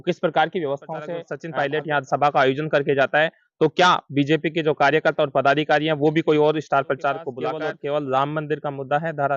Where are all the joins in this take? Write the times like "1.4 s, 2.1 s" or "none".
1.4 s, 7.4 s